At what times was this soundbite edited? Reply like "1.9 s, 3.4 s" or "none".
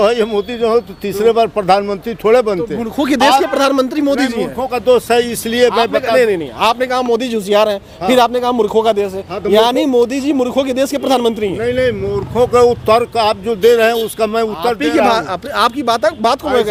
none